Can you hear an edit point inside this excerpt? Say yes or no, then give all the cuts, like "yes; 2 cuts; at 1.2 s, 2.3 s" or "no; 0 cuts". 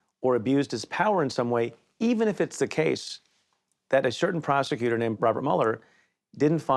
yes; 1 cut; at 5.1 s